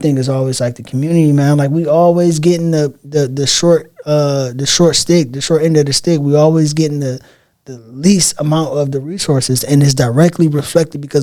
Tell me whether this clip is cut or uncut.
uncut